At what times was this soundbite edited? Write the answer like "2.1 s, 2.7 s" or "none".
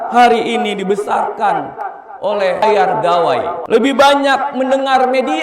2.6 s, 3.6 s